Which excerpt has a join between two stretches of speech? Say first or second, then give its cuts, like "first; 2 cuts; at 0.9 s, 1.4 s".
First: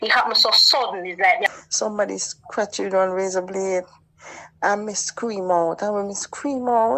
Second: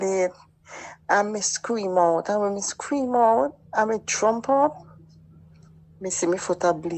first; 1 cut; at 1.4 s